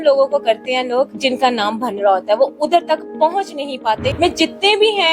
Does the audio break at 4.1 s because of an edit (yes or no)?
yes